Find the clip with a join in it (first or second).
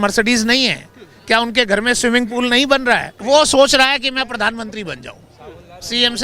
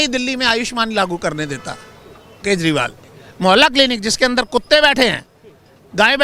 first